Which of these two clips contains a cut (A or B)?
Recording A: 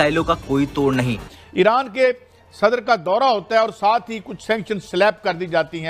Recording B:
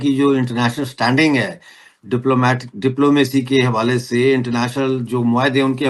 A